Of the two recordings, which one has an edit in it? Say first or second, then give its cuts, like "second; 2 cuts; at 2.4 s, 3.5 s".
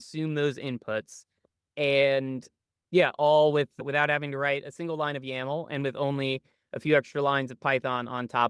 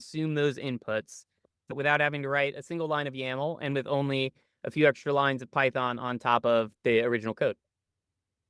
second; 2 cuts; at 1.7 s, 6.7 s